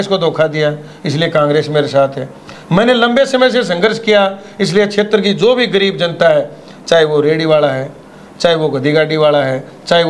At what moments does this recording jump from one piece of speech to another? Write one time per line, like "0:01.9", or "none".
none